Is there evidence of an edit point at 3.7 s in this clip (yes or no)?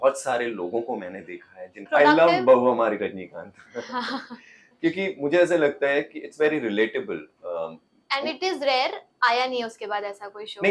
no